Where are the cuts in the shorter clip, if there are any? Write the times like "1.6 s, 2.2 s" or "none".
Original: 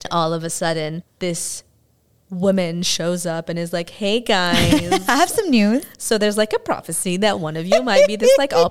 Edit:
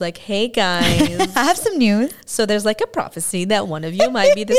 none